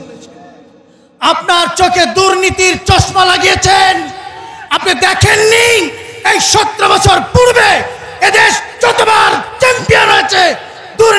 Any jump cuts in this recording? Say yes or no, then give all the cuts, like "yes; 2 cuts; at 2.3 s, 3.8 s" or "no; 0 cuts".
no; 0 cuts